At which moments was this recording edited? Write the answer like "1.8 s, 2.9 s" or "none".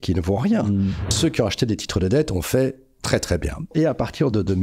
1.1 s, 3.7 s